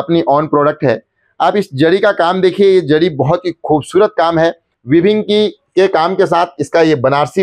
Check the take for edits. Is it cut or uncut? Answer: cut